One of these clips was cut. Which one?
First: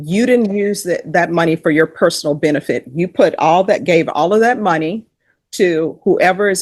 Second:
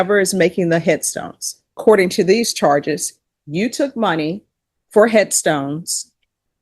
second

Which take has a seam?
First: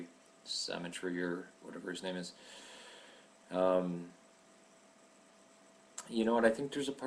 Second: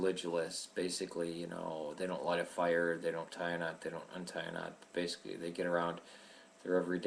first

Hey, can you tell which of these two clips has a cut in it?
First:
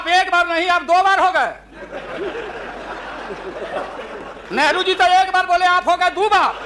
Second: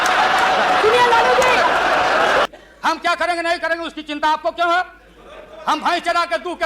second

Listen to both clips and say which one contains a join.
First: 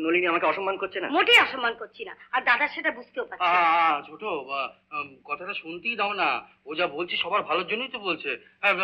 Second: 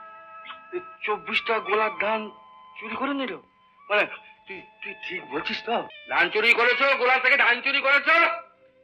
second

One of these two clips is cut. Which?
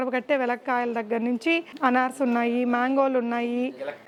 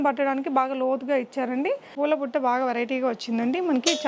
second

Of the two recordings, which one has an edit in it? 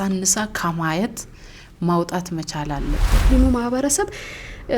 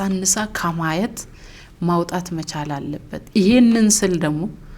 first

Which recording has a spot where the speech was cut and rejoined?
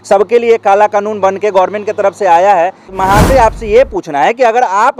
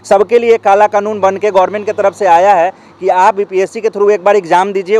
first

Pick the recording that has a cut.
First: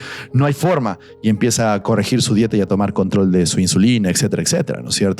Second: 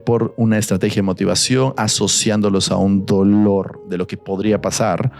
first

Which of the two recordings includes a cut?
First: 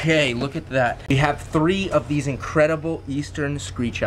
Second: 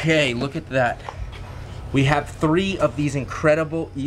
first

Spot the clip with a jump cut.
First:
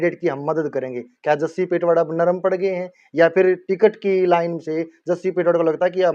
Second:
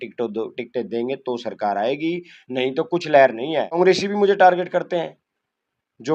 second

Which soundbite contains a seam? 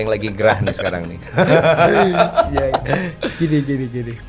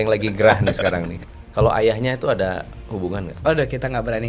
second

